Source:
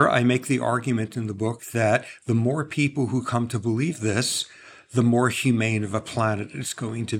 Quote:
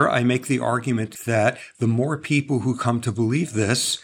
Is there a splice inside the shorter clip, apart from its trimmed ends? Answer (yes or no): yes